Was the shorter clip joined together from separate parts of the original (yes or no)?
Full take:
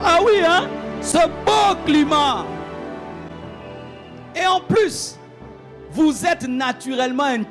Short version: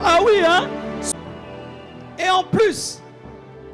yes